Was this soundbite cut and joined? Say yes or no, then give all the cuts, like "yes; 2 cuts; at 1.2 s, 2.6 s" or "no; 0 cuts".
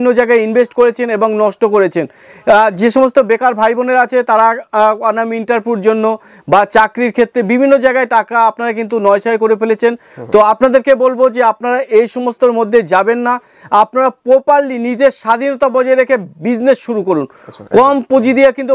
no; 0 cuts